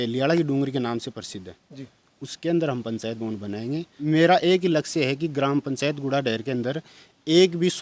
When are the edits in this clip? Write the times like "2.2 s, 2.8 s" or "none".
3.9 s